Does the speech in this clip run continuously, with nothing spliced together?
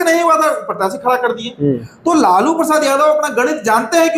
yes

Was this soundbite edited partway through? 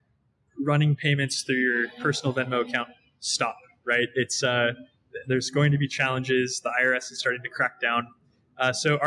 no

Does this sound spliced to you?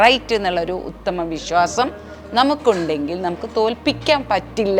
no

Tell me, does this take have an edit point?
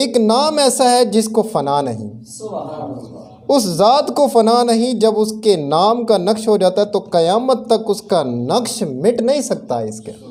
no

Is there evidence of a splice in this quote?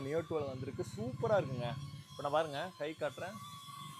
no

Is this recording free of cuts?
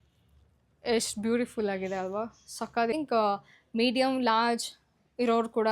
no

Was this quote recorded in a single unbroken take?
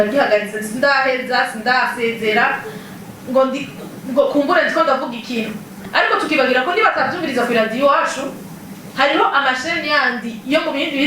no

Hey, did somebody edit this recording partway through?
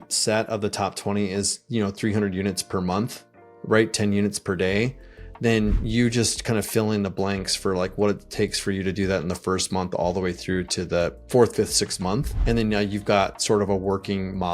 yes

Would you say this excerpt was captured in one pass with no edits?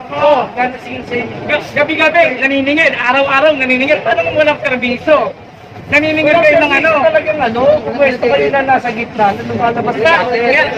yes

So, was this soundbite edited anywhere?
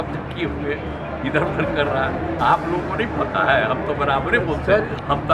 no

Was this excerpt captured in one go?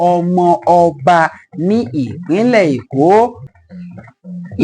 no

